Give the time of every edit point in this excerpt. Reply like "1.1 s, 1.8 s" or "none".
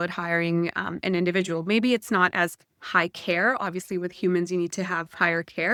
none